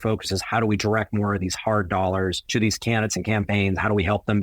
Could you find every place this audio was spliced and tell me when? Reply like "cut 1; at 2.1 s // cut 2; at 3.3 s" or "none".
cut 1; at 2.4 s